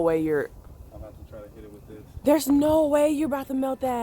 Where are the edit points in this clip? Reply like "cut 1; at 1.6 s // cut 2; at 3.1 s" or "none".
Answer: cut 1; at 2.8 s